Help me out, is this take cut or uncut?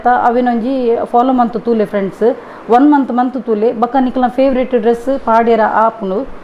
uncut